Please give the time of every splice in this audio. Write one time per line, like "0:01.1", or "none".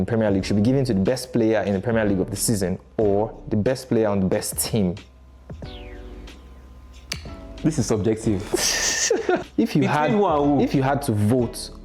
0:09.4